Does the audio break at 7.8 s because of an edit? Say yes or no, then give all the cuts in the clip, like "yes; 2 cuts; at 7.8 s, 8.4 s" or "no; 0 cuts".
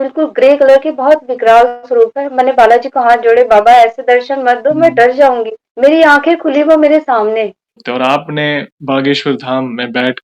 yes; 1 cut; at 7.8 s